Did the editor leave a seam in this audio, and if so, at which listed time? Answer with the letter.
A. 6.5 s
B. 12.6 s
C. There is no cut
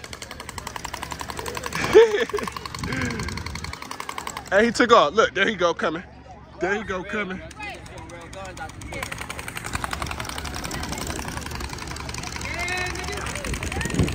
C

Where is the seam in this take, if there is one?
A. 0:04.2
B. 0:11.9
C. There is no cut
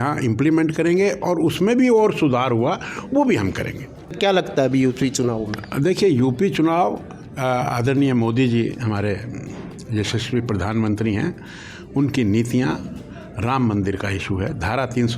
A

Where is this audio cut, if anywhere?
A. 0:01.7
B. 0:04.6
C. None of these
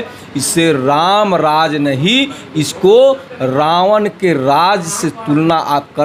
C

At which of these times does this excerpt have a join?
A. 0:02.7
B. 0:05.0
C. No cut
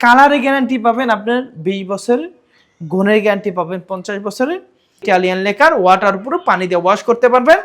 B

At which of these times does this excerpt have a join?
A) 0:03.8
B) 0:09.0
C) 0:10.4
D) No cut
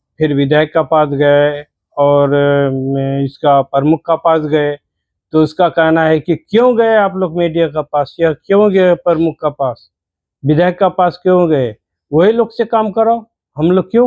D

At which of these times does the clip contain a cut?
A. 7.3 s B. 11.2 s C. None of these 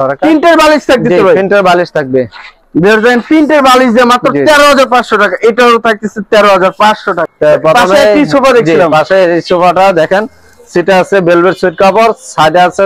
A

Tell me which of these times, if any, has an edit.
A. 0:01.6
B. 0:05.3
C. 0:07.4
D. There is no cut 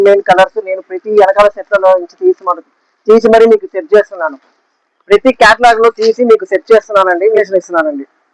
C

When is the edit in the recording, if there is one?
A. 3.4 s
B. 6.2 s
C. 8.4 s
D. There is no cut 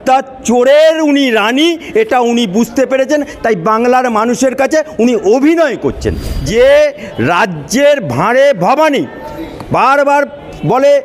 B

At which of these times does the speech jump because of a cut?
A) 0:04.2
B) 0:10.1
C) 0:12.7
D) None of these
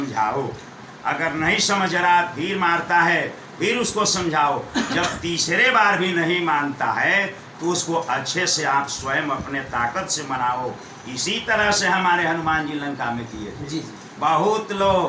D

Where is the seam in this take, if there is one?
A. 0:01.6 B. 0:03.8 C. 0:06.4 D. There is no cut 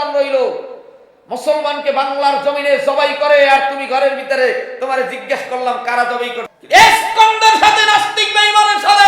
C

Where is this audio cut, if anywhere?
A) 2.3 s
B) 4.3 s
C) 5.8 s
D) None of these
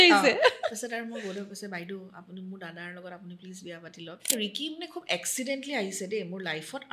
B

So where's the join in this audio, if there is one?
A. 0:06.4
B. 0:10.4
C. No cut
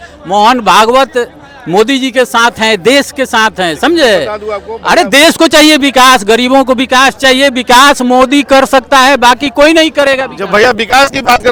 C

